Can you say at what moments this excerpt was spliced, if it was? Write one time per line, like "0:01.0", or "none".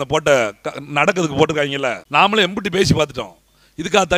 0:02.0